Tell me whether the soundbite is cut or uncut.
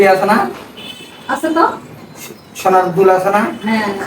uncut